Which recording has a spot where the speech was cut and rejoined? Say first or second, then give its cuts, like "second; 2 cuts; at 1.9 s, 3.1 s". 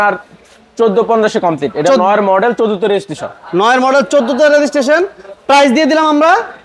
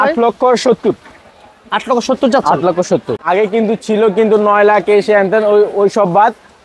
second; 1 cut; at 3.1 s